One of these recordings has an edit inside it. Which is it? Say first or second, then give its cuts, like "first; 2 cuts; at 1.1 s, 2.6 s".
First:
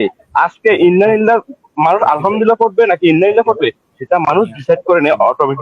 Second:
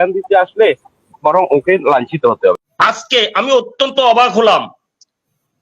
second; 1 cut; at 2.5 s